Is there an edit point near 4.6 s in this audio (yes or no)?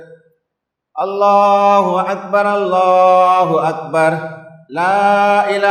no